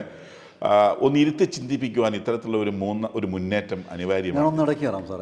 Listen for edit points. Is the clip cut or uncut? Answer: uncut